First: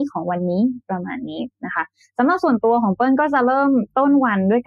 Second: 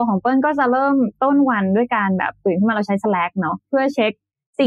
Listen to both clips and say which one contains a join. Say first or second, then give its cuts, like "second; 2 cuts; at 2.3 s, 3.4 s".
second; 1 cut; at 3.6 s